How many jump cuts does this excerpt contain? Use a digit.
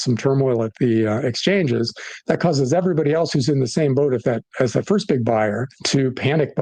1